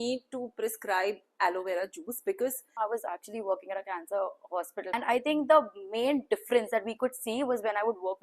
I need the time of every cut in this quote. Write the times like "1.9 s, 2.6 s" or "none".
2.7 s, 4.9 s